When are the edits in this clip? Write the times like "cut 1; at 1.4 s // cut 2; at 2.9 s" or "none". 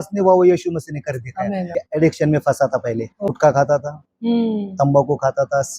cut 1; at 1.7 s // cut 2; at 3.3 s